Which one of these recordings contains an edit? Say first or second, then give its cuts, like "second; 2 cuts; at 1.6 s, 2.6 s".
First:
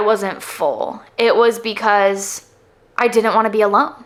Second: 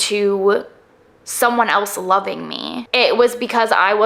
second; 1 cut; at 2.7 s